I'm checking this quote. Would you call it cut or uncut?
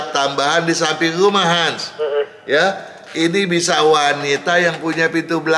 uncut